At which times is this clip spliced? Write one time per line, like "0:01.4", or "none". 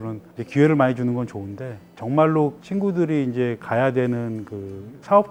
none